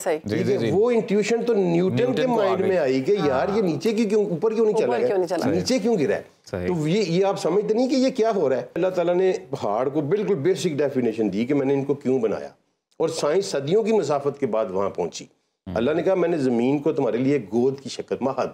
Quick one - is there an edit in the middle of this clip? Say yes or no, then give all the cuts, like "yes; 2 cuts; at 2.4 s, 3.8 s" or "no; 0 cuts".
yes; 1 cut; at 8.8 s